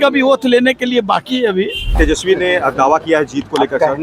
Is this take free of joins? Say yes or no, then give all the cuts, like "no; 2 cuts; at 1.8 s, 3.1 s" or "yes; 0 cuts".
no; 1 cut; at 1.9 s